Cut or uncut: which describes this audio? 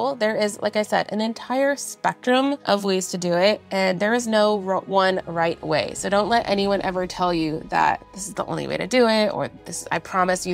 cut